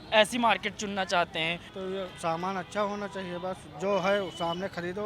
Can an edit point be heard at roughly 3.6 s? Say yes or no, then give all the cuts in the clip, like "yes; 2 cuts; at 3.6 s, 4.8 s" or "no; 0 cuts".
no; 1 cut; at 1.7 s